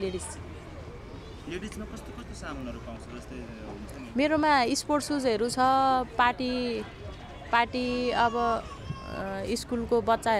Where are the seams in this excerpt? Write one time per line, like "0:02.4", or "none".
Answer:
none